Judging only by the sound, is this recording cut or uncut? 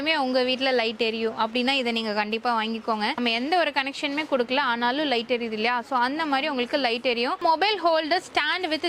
cut